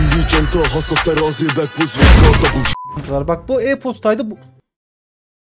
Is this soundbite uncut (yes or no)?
no